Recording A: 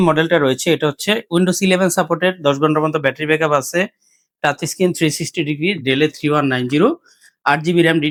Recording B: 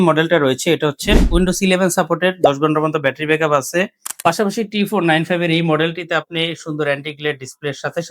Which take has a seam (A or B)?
B